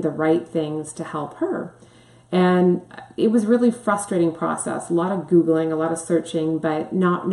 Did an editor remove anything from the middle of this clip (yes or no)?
no